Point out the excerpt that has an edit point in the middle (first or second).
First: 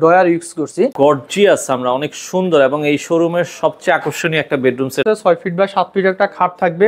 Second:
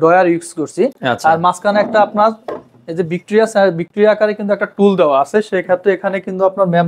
first